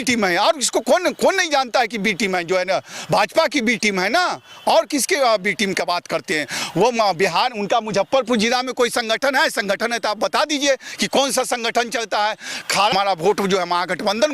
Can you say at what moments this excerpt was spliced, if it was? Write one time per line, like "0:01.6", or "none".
0:12.9